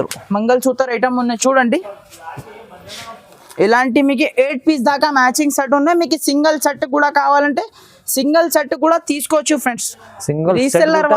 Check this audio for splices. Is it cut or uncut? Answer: cut